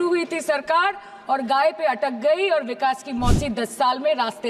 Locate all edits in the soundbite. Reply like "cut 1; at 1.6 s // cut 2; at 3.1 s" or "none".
none